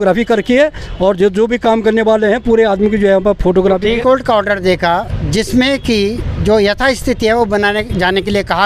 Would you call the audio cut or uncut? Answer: cut